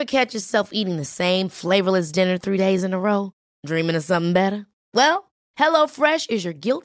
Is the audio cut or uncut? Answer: uncut